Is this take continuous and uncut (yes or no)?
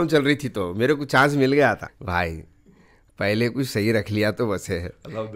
no